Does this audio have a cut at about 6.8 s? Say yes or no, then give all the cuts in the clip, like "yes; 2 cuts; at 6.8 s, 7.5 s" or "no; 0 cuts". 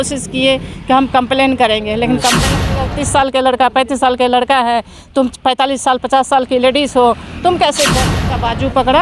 no; 2 cuts; at 2.9 s, 8.2 s